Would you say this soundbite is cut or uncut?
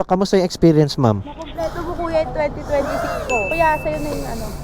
cut